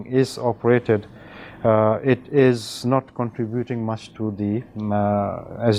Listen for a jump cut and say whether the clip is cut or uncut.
uncut